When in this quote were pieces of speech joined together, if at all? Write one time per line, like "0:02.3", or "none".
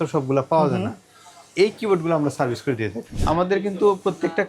0:03.1